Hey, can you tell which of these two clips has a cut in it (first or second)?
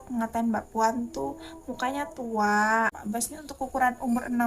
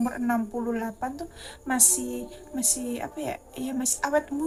first